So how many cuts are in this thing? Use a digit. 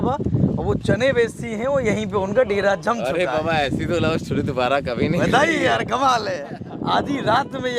0